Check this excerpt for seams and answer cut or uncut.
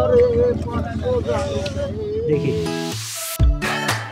cut